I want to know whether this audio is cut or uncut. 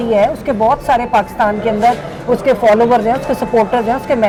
uncut